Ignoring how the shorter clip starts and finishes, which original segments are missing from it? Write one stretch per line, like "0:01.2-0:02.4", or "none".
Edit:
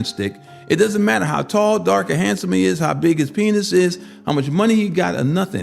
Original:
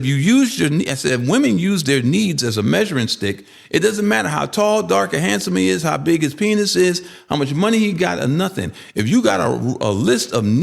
none